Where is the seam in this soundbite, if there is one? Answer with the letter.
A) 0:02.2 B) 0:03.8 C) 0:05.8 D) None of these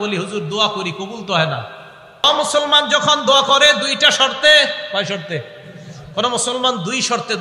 A